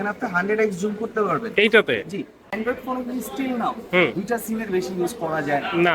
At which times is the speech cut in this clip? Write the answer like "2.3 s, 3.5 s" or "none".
2.4 s

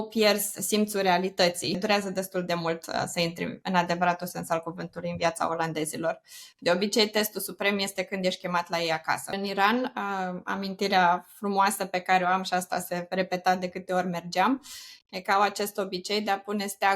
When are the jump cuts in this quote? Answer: 1.8 s, 9.3 s

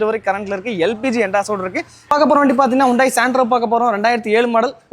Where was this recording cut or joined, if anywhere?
2.1 s

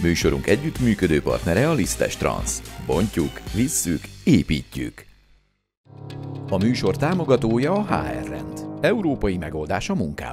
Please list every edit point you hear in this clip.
none

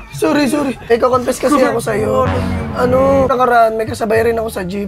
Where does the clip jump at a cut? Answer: 0.8 s, 3.3 s

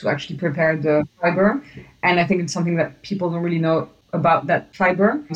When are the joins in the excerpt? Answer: none

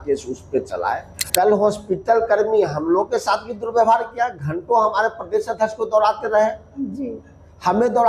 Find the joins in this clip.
1.2 s

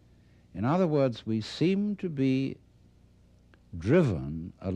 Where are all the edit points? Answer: 1.7 s

